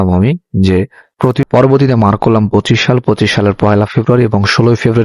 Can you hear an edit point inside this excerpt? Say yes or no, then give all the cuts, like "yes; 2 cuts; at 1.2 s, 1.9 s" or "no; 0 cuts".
yes; 1 cut; at 1.4 s